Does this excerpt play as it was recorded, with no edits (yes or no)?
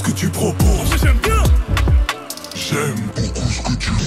yes